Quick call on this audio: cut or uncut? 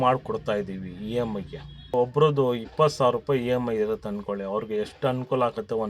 cut